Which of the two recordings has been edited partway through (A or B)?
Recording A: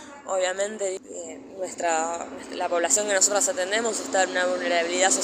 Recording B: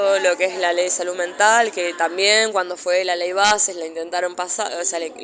A